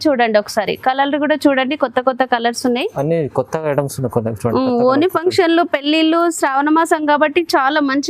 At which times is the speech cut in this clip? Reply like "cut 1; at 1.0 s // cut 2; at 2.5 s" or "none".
none